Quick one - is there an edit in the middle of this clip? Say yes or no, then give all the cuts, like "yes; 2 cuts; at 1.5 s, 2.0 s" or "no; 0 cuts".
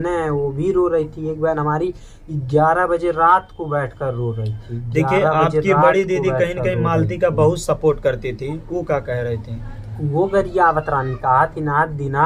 no; 0 cuts